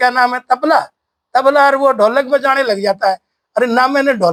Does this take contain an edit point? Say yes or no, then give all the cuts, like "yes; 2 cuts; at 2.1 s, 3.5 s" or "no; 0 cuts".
no; 0 cuts